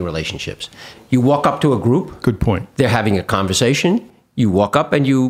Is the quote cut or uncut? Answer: cut